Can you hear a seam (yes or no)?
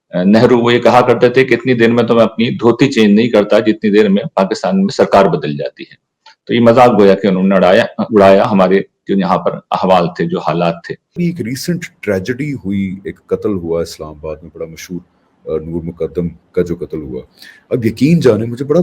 yes